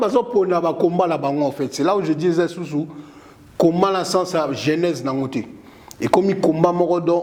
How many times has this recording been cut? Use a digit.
0